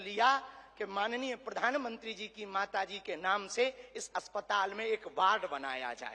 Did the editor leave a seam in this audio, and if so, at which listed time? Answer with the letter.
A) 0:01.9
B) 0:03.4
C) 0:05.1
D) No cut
D